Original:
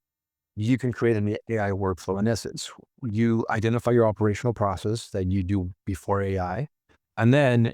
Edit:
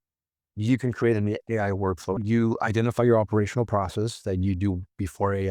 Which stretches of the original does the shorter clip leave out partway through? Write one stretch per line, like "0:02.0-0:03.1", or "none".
0:02.2-0:03.0